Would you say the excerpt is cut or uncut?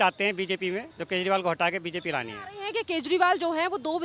cut